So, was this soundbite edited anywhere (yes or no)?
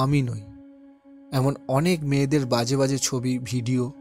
no